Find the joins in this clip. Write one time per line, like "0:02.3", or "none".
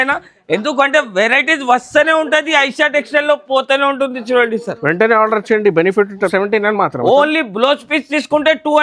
0:06.3